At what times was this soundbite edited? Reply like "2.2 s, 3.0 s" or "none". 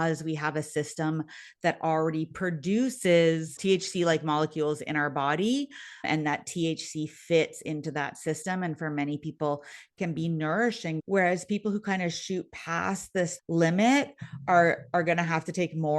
6.0 s, 11.0 s, 13.4 s